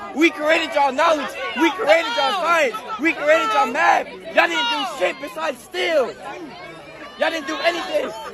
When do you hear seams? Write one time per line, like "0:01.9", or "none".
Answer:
none

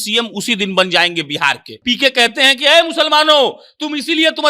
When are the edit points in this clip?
0:01.7

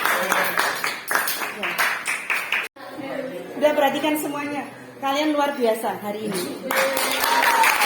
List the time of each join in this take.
0:02.7

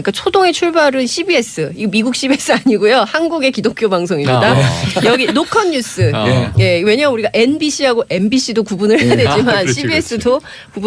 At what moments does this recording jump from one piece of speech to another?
0:09.6

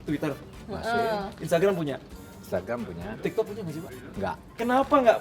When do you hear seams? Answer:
none

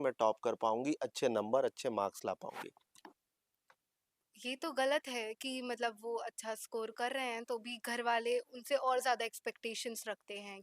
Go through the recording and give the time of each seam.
0:02.9

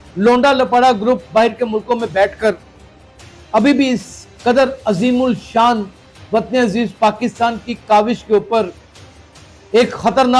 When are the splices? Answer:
none

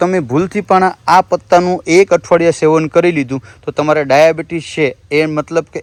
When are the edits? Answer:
none

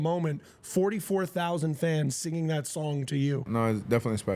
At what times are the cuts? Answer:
0:03.5

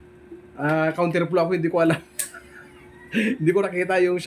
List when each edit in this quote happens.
none

